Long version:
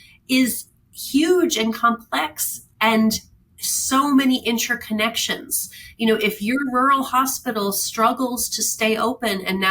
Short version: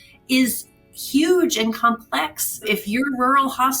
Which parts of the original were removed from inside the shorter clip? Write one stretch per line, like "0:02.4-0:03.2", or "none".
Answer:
0:02.7-0:06.2